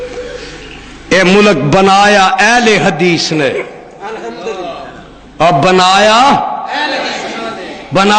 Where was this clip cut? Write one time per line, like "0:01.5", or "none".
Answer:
0:04.8